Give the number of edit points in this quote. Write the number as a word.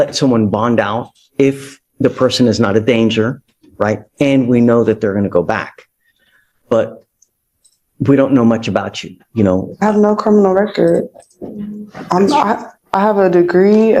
zero